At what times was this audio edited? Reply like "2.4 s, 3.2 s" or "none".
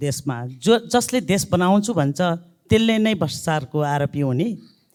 none